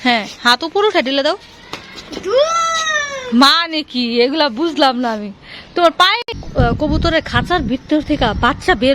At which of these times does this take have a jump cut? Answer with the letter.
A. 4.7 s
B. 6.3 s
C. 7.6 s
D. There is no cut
B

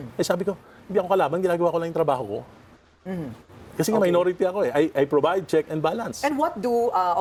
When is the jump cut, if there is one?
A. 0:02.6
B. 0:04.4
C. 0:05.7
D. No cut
D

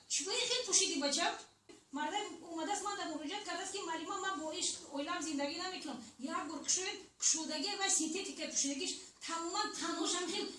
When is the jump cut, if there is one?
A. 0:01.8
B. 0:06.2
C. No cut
A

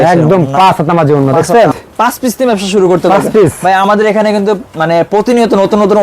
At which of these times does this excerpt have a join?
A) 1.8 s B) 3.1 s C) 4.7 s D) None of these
A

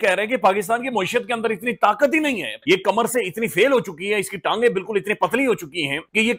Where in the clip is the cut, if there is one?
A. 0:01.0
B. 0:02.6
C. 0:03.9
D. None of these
B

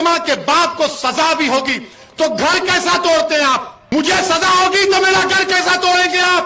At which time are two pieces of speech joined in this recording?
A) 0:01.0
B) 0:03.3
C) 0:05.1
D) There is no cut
B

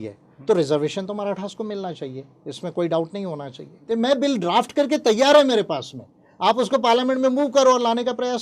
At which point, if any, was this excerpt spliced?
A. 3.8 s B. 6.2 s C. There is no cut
A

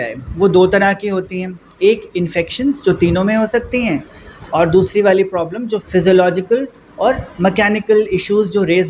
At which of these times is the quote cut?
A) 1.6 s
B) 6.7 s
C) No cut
C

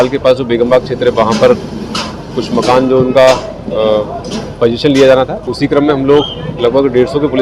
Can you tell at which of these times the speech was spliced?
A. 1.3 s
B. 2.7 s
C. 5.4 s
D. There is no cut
C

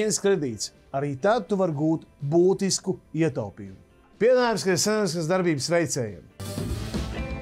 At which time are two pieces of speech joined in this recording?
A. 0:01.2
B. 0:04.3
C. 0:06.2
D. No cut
C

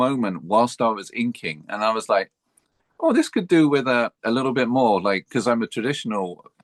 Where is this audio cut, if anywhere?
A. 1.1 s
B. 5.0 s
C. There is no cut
C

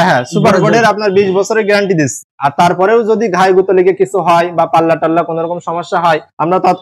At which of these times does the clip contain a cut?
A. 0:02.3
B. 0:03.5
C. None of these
A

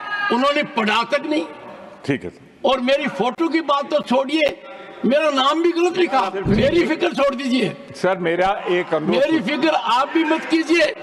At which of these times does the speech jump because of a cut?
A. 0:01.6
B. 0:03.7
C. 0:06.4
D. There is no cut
C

